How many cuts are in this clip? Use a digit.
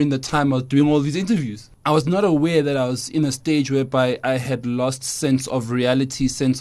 1